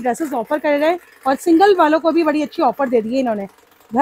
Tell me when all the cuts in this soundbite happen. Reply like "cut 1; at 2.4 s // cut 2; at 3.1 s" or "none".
none